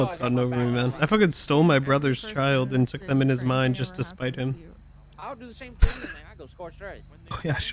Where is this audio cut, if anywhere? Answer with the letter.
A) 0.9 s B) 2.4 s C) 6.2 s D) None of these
A